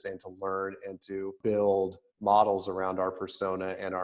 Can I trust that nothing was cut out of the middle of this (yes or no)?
no